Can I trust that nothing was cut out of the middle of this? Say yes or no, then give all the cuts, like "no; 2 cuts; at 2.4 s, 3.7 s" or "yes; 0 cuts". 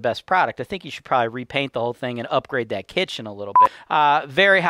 no; 1 cut; at 3.7 s